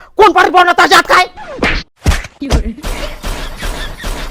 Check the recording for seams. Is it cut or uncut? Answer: uncut